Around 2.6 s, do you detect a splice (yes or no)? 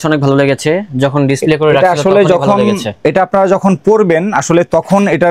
no